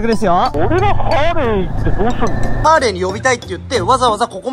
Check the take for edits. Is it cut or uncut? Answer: cut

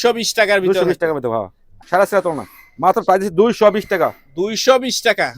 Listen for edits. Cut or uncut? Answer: cut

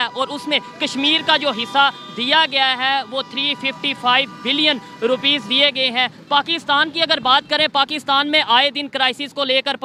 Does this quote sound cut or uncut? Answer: uncut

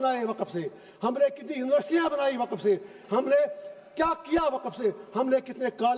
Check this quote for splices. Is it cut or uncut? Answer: uncut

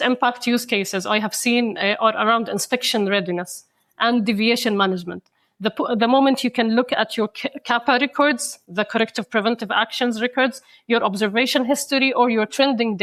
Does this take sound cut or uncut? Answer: uncut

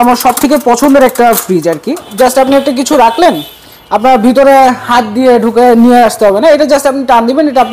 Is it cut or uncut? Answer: cut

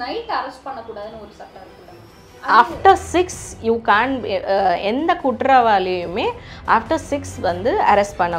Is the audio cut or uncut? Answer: uncut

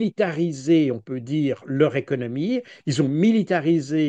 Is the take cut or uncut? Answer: uncut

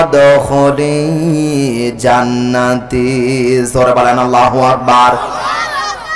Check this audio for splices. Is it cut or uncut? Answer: uncut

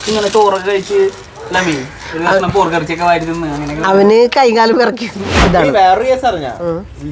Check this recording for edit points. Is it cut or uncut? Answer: cut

